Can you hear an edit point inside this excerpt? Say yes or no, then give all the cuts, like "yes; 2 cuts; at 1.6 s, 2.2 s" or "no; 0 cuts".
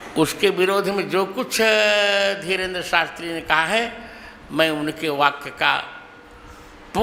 no; 0 cuts